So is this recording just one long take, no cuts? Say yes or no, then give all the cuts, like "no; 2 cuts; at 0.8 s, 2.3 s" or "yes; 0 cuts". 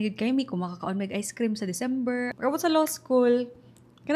no; 1 cut; at 2.3 s